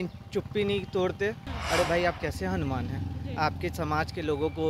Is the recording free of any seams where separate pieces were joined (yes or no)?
no